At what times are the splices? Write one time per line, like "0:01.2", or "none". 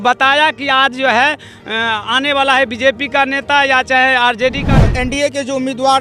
0:04.7